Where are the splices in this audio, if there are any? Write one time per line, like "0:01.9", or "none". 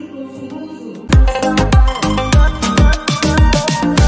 0:01.0

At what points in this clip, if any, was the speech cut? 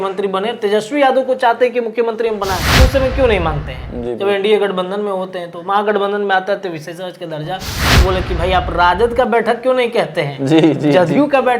0:02.7
0:07.9

